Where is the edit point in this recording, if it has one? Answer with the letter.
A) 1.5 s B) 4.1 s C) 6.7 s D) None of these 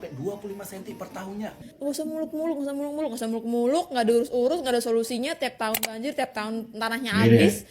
A